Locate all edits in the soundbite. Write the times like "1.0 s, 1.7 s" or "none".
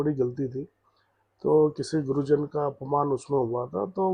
none